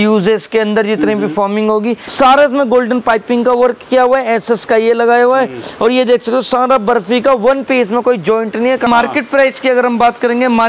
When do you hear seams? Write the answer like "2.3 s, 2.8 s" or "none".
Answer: 2.0 s, 8.9 s

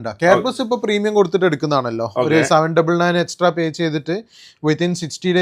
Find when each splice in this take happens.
none

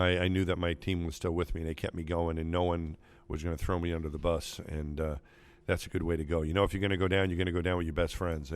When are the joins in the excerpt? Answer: none

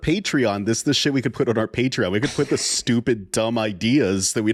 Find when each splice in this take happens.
none

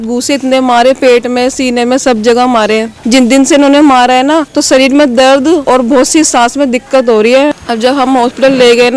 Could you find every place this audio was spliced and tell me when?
2.9 s, 4.5 s, 5.6 s, 7.5 s

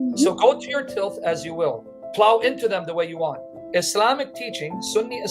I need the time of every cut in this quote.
1.9 s, 3.5 s

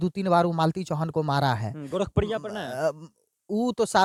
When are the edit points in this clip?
none

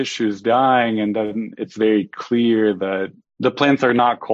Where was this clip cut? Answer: none

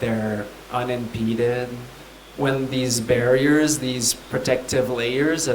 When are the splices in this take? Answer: 2.2 s

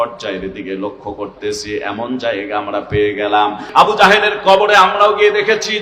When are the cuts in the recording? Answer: 3.6 s

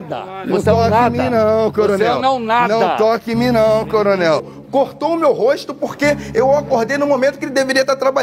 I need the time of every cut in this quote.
4.5 s

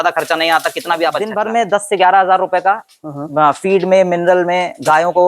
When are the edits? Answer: 1.3 s

